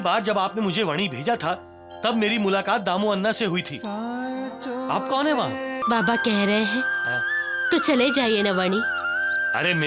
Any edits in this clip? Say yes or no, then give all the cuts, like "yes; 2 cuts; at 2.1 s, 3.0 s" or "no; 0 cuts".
yes; 1 cut; at 5.8 s